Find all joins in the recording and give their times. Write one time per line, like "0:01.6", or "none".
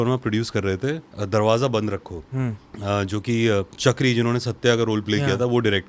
0:01.1
0:02.7
0:03.7